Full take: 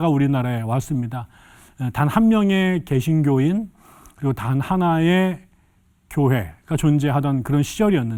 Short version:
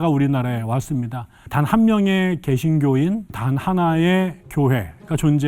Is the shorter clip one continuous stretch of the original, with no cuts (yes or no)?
no